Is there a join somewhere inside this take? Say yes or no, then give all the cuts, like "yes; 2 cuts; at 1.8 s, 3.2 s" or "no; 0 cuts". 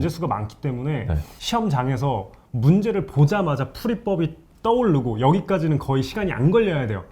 yes; 1 cut; at 1.3 s